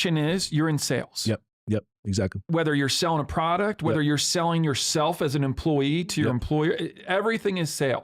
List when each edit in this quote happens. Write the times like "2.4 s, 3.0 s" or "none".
2.4 s